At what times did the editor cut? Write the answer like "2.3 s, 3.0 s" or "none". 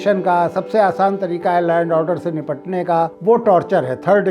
3.1 s